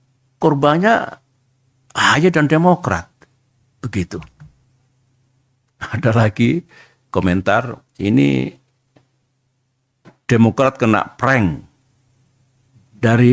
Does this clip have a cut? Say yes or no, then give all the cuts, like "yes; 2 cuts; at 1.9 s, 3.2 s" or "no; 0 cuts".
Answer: no; 0 cuts